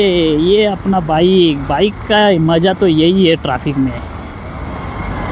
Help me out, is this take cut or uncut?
uncut